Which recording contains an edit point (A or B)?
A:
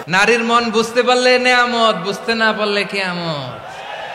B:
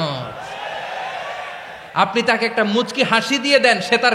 B